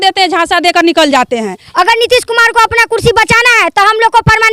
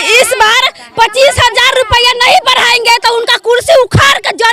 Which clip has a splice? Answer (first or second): first